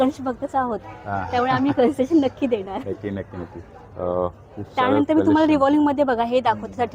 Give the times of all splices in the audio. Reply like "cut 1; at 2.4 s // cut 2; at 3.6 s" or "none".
none